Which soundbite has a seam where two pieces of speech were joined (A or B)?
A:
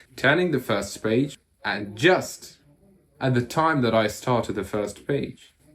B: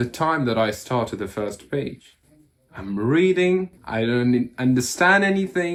A